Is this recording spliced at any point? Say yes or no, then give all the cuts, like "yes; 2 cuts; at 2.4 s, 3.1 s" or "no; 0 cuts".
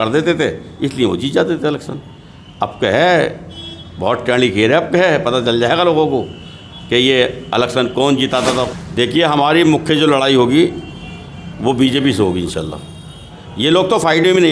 yes; 1 cut; at 8.7 s